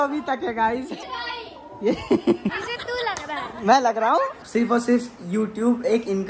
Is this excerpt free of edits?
no; 3 cuts; at 1.0 s, 2.7 s, 4.4 s

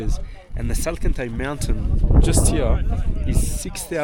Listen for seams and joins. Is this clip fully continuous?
yes; 0 cuts

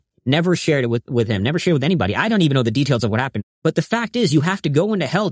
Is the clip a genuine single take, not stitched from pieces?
no; 1 cut; at 3.4 s

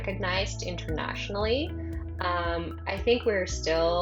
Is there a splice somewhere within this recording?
no; 0 cuts

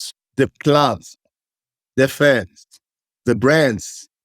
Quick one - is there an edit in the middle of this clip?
yes; 1 cut; at 3.1 s

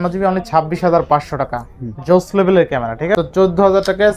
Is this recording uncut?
no; 1 cut; at 3.1 s

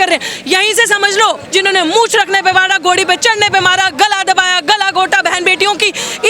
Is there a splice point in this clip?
yes; 1 cut; at 1.4 s

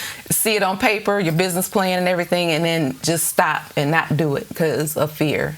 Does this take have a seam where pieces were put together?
no; 0 cuts

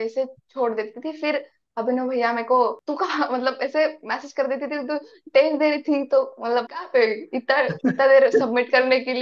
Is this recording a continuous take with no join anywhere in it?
yes; 0 cuts

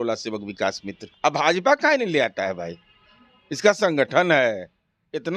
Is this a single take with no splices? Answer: no; 1 cut; at 1.1 s

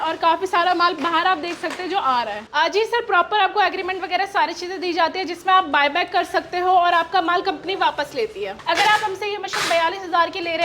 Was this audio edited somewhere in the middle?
yes; 2 cuts; at 2.4 s, 8.5 s

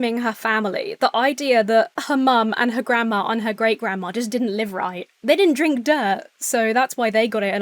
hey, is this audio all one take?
no; 1 cut; at 2.0 s

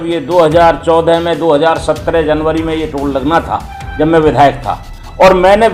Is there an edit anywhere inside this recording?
no; 0 cuts

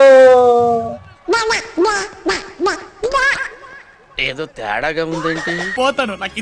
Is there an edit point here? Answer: yes; 1 cut; at 1.1 s

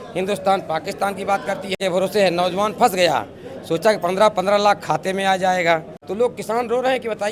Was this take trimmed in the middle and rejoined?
yes; 2 cuts; at 1.8 s, 6.0 s

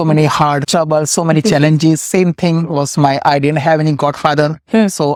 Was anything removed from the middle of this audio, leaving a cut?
no; 0 cuts

